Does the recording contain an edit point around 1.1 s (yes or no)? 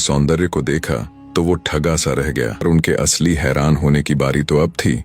no